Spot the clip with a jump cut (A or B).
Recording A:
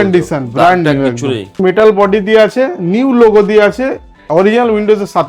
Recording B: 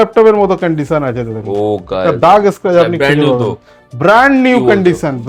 A